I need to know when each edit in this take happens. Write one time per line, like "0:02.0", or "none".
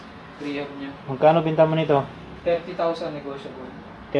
none

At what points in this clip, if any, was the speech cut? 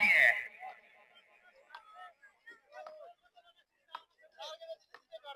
none

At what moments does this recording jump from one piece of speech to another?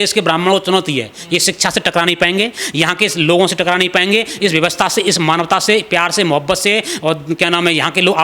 none

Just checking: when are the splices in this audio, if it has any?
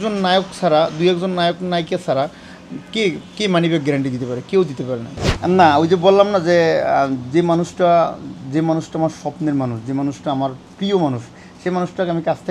0:05.1

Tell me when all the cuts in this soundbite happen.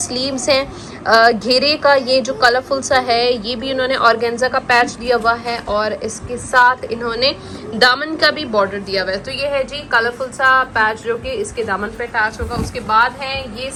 none

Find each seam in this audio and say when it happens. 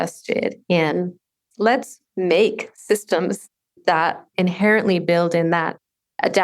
0:01.5
0:04.1

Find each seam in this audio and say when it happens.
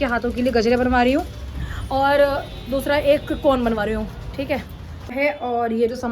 0:04.9

